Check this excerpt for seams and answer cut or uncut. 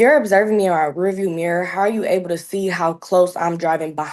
uncut